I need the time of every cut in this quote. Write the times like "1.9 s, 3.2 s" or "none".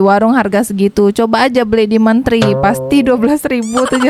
none

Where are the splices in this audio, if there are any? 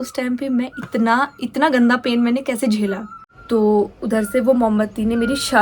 2.9 s

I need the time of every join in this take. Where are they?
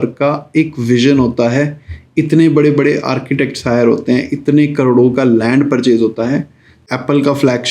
6.8 s

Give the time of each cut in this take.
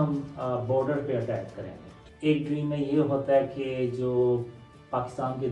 2.0 s

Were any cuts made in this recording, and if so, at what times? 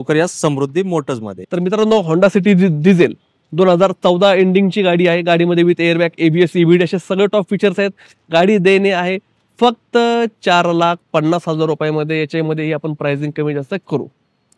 none

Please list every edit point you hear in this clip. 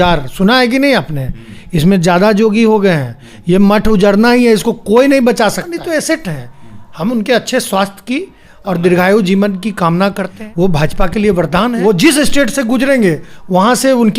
5.8 s, 10.3 s, 11.7 s

